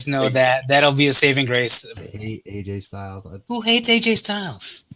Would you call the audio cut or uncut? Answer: cut